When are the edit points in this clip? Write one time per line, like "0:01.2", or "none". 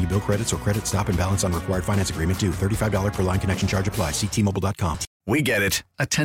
0:05.1